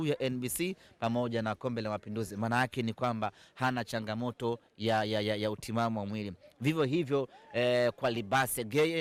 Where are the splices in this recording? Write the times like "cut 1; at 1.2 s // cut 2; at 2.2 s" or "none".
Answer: none